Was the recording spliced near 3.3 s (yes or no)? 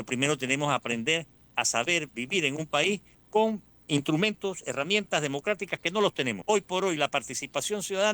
yes